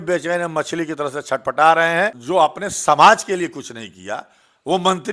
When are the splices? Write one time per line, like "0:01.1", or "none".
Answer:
0:02.2

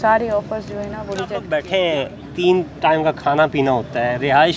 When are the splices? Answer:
0:01.4

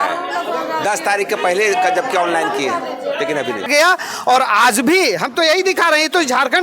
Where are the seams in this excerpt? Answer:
0:03.7

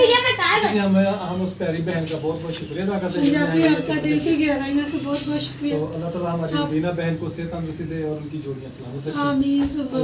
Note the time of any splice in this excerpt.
none

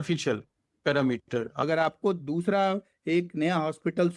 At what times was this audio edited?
0:01.5

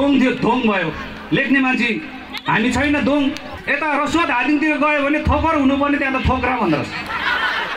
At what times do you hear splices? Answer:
0:03.5

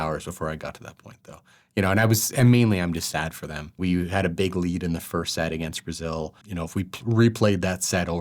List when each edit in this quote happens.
0:03.8
0:06.4

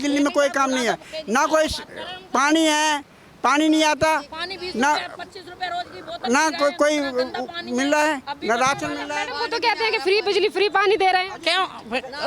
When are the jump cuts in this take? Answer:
none

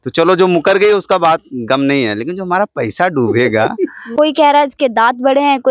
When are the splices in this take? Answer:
0:04.1

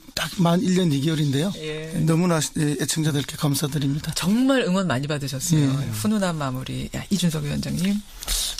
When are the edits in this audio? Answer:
0:06.5

